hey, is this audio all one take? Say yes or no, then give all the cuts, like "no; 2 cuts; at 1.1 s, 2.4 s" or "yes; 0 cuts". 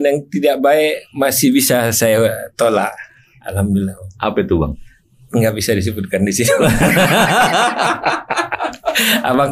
yes; 0 cuts